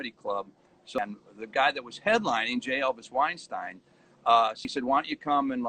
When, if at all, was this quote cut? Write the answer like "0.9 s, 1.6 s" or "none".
1.0 s, 4.7 s